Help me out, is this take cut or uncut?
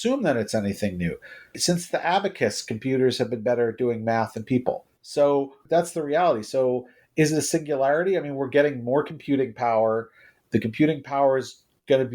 cut